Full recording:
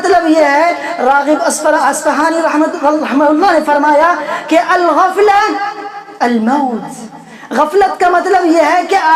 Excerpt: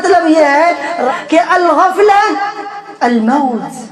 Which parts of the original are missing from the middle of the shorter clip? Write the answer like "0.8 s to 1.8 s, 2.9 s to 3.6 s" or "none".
1.1 s to 4.2 s